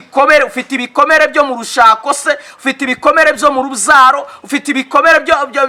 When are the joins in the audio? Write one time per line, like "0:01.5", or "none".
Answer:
none

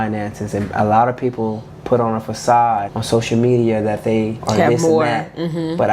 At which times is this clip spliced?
0:02.9
0:04.4

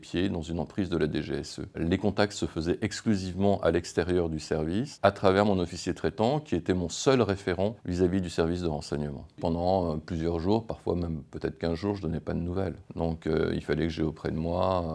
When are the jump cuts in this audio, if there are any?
0:01.7
0:09.3

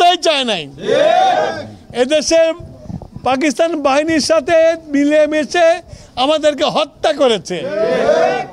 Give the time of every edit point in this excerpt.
none

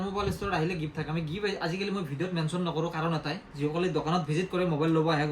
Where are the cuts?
none

